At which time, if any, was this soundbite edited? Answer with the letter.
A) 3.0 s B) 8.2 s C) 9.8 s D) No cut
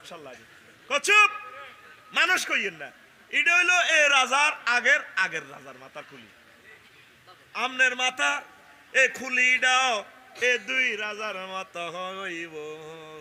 D